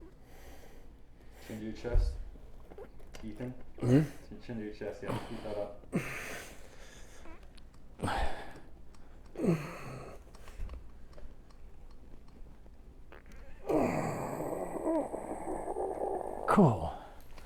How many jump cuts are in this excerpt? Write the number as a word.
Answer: one